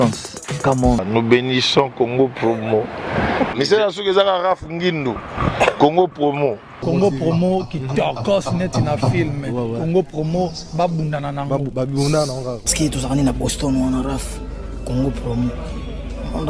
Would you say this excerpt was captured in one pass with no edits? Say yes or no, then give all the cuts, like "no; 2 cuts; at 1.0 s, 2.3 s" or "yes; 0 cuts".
yes; 0 cuts